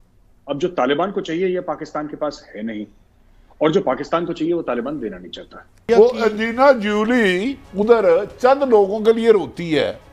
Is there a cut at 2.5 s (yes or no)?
no